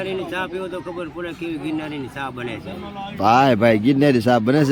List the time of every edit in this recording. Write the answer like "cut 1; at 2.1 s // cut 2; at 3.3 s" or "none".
none